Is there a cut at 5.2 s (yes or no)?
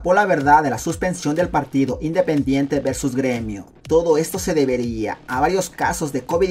no